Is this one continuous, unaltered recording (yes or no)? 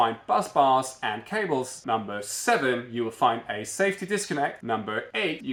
yes